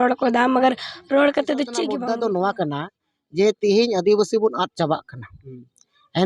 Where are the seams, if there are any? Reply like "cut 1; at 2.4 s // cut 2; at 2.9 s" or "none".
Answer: cut 1; at 1.9 s